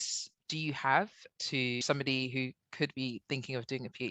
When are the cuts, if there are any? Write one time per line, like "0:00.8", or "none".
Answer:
0:01.8